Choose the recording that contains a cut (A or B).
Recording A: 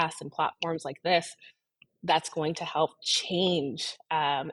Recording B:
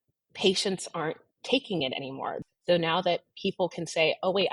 B